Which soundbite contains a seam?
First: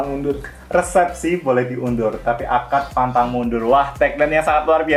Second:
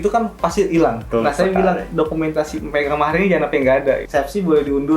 second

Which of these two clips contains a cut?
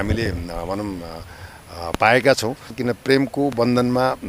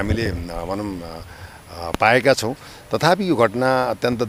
first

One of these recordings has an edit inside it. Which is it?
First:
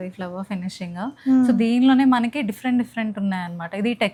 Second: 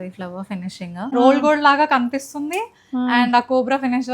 second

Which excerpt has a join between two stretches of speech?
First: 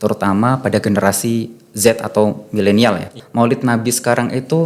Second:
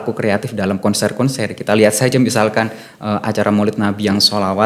first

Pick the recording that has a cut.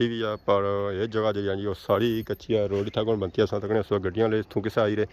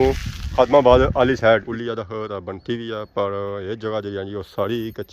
second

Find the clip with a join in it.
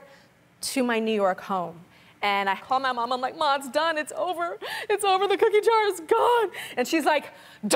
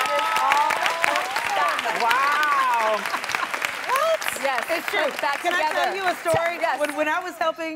first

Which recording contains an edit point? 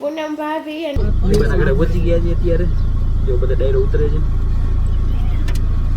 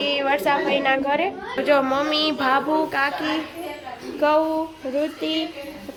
first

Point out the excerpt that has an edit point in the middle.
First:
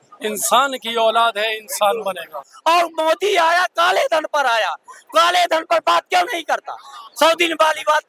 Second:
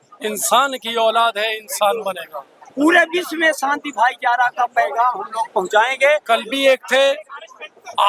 first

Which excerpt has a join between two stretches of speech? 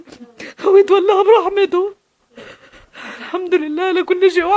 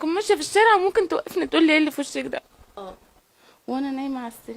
second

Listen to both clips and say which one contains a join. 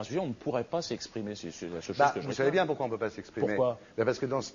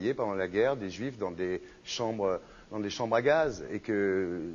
first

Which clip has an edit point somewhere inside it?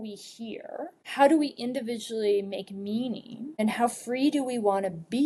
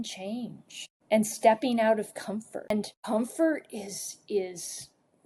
second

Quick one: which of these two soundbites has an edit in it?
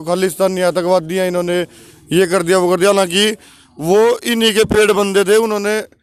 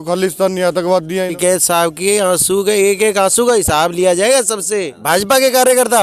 second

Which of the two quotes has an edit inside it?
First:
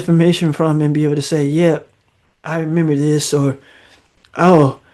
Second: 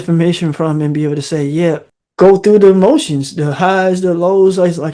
second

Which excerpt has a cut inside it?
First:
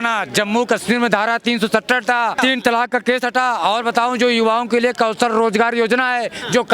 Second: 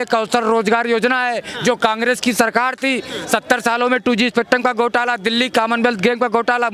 first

